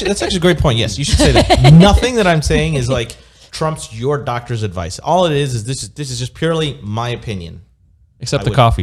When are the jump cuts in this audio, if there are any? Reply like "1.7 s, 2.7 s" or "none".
none